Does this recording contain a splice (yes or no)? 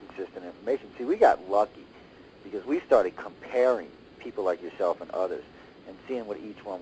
no